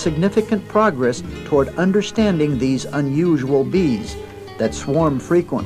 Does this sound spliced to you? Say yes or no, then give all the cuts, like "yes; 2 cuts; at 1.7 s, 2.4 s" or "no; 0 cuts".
no; 0 cuts